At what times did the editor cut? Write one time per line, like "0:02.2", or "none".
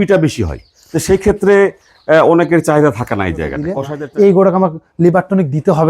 0:03.8